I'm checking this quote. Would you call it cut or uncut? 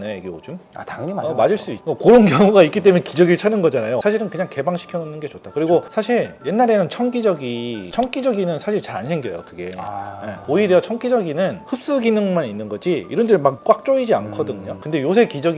cut